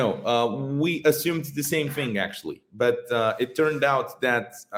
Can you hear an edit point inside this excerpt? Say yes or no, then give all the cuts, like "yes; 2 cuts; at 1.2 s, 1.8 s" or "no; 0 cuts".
no; 0 cuts